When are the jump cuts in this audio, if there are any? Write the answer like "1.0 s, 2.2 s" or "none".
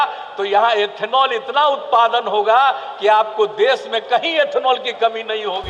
none